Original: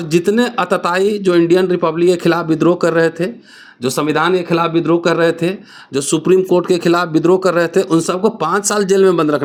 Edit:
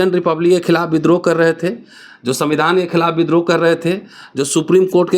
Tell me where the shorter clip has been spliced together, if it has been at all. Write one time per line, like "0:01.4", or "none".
none